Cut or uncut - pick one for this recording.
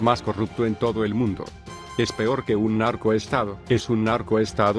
cut